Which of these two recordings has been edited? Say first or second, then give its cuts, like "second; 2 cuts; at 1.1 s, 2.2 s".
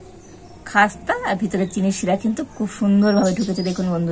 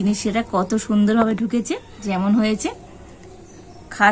second; 1 cut; at 1.9 s